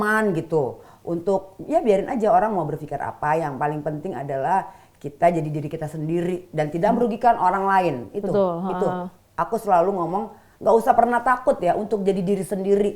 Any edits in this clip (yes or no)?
no